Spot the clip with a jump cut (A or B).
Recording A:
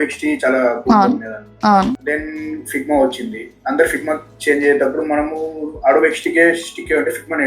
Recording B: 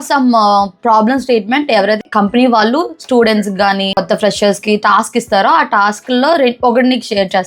B